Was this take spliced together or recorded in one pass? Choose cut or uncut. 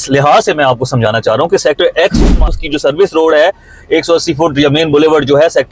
cut